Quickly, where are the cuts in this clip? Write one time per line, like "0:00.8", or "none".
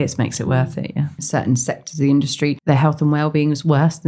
0:01.2
0:02.6